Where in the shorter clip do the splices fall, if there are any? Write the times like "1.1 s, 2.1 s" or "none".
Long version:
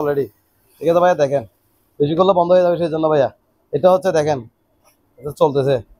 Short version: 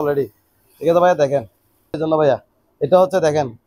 1.9 s